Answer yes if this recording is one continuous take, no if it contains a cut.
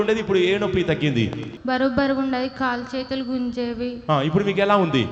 no